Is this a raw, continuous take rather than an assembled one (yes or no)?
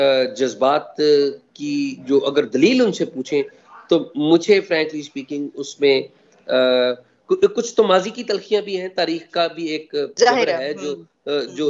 yes